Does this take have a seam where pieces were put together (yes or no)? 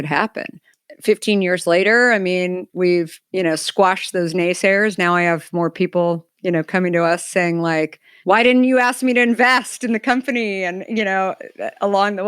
yes